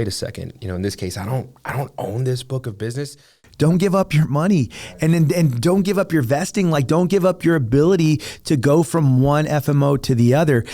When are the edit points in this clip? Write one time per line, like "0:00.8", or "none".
0:03.4

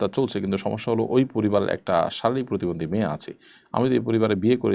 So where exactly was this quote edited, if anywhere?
none

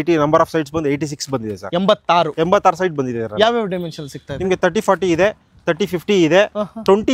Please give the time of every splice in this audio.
none

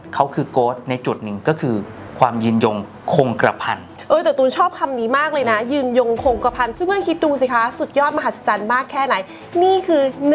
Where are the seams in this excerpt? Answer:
0:06.7

